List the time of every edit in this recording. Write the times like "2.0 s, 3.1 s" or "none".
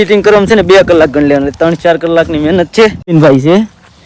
3.1 s